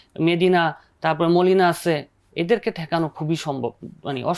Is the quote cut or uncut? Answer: uncut